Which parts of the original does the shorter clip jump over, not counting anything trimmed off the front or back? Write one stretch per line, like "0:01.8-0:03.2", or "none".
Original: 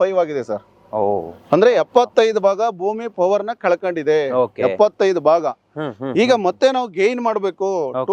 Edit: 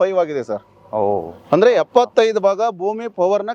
none

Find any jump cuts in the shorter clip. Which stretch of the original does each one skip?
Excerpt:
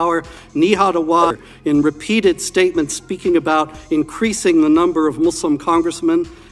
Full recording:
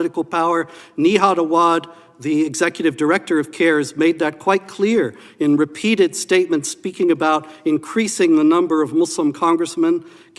0:01.7-0:05.1

